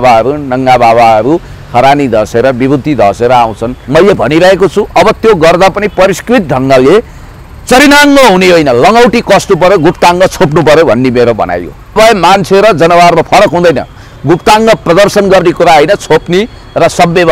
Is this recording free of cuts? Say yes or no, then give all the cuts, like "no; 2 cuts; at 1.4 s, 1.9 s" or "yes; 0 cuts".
no; 2 cuts; at 3.7 s, 12.0 s